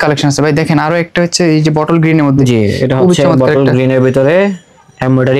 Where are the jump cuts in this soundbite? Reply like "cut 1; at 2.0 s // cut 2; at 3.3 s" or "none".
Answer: none